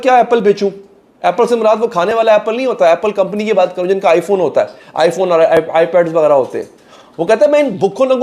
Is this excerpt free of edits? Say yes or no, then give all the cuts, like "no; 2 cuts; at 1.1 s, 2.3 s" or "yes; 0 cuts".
yes; 0 cuts